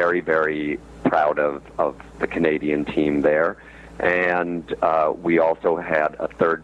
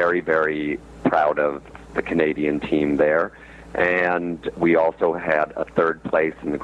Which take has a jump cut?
second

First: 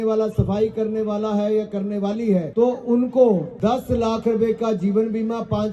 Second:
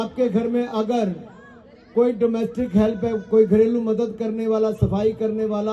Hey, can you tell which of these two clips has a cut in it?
first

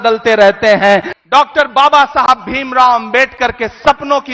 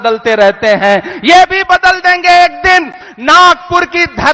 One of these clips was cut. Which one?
first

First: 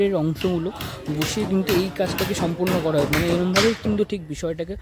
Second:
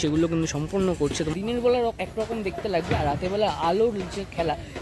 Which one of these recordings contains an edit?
second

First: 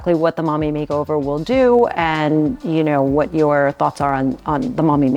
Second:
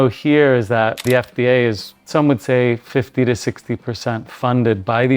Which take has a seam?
second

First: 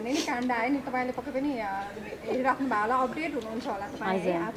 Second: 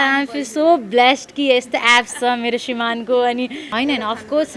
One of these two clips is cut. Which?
second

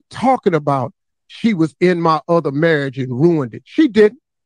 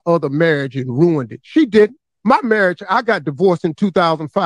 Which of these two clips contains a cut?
first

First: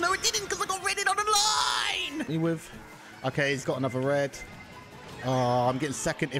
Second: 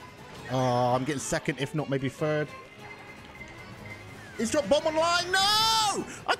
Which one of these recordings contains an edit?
first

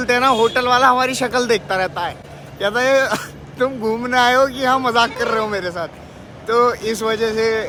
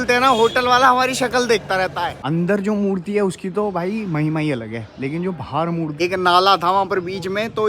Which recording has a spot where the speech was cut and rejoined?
second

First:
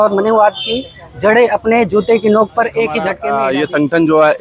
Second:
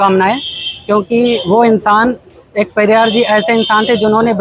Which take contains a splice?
first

